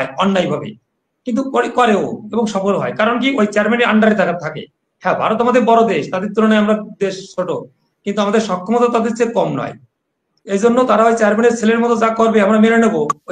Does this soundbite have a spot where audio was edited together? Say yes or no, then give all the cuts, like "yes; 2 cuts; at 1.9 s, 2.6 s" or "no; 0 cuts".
no; 0 cuts